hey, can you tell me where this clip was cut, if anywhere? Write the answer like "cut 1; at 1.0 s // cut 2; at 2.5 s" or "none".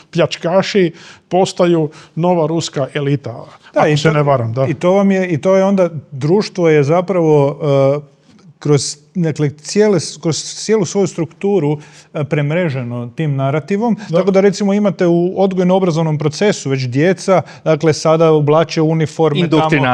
none